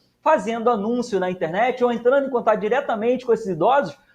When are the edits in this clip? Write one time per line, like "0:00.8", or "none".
none